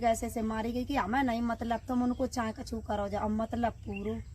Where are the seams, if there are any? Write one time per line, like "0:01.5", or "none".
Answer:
none